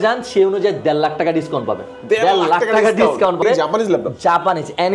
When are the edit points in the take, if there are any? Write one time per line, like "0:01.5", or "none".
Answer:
0:03.4